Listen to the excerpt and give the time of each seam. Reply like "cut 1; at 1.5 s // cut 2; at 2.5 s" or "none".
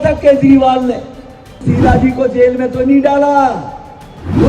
cut 1; at 1.6 s